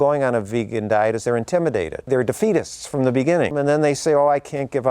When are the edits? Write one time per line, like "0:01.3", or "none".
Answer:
0:03.5